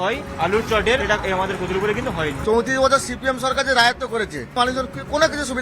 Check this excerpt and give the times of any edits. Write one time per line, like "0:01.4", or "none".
0:01.0
0:02.4
0:04.5